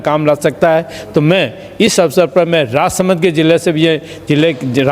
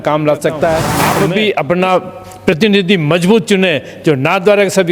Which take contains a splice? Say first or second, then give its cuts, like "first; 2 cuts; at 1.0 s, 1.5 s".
second; 1 cut; at 1.0 s